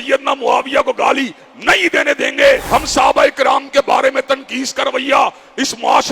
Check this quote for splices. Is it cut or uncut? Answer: cut